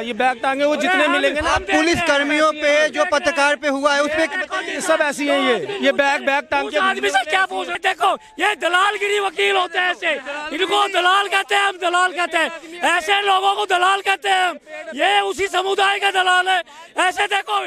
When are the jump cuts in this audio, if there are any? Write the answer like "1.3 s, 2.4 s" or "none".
7.8 s